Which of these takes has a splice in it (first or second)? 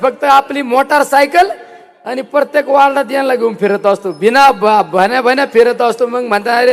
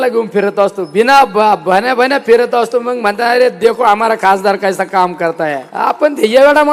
second